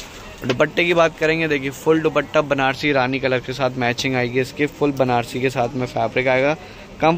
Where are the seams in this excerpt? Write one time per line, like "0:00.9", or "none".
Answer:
none